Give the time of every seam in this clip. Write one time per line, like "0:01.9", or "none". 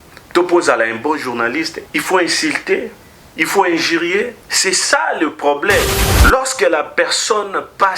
0:01.8
0:04.4
0:06.0